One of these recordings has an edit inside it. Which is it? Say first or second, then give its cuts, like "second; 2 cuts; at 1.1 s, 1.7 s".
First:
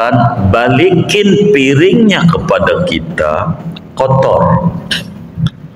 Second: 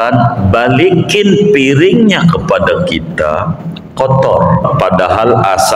second; 1 cut; at 4.6 s